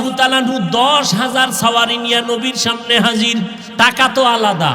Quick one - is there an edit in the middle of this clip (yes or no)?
yes